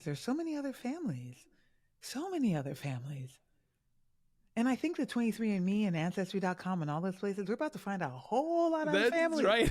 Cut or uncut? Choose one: uncut